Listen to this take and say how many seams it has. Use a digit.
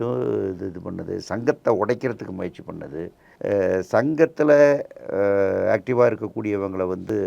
1